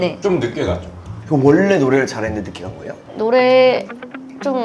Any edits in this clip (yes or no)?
yes